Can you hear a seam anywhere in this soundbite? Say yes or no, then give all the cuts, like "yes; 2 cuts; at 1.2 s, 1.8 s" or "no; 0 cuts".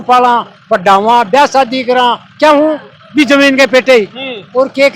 no; 0 cuts